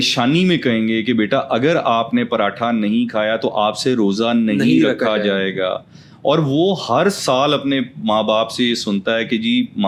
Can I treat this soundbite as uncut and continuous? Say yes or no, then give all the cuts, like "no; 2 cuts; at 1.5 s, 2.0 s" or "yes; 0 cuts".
yes; 0 cuts